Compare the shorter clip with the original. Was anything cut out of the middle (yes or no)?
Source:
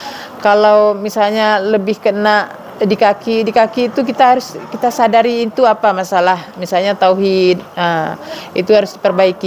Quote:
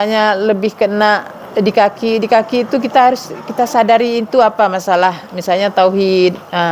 no